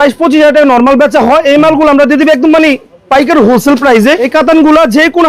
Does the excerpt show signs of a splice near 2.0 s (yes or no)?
no